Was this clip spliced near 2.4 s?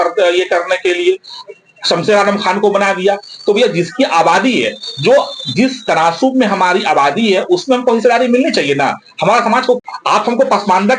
no; 1 cut; at 9.8 s

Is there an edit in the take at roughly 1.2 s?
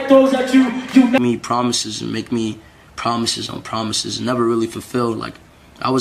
yes; 1 cut; at 1.2 s

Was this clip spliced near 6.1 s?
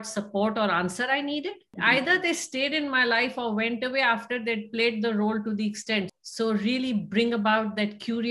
yes; 2 cuts; at 1.7 s, 6.1 s

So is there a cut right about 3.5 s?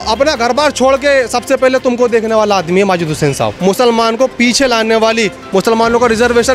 yes; 1 cut; at 3.5 s

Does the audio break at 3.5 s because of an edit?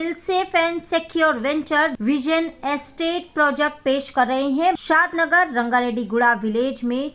no; 2 cuts; at 2.0 s, 4.8 s

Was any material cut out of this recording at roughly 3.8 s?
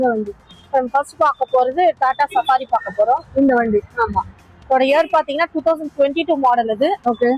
no; 0 cuts

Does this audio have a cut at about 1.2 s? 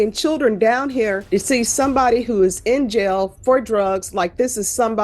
yes; 1 cut; at 1.2 s

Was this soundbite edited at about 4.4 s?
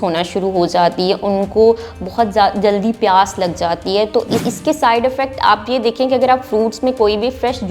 yes; 1 cut; at 4.4 s

